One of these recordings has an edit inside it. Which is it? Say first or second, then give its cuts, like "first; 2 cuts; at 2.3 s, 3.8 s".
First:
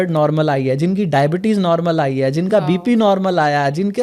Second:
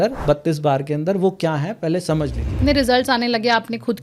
second; 1 cut; at 2.6 s